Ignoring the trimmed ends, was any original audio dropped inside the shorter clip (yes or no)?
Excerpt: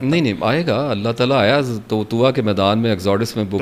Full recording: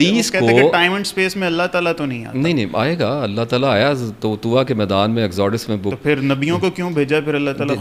no